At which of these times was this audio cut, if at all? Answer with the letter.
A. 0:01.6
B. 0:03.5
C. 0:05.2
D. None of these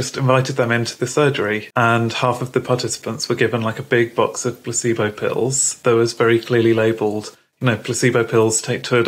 A